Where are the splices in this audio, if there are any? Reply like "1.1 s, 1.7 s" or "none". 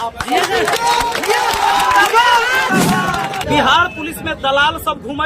3.4 s